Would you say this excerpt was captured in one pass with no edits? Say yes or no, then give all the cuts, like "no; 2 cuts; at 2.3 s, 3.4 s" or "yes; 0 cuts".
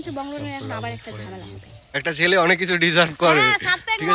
no; 1 cut; at 1.9 s